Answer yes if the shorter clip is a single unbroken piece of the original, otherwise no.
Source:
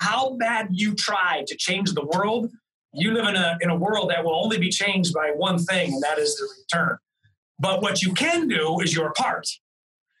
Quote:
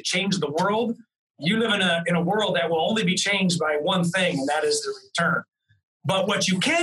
yes